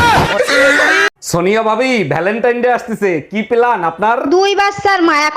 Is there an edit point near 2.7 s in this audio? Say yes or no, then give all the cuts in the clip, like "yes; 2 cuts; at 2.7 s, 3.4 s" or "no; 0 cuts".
no; 1 cut; at 1.1 s